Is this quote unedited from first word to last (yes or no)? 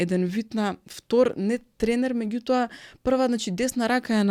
yes